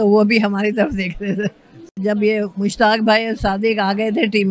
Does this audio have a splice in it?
yes; 1 cut; at 2.0 s

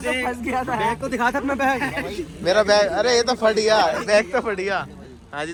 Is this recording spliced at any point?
no; 0 cuts

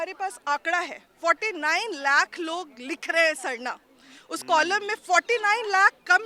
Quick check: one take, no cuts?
yes; 0 cuts

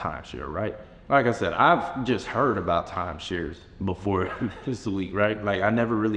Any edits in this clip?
no; 0 cuts

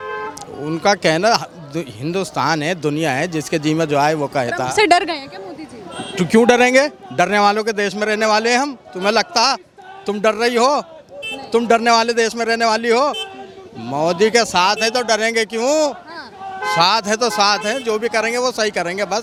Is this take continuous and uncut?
yes; 0 cuts

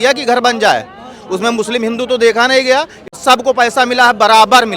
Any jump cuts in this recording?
yes; 1 cut; at 3.1 s

